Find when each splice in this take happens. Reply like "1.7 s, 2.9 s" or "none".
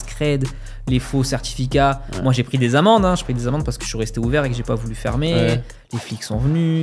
none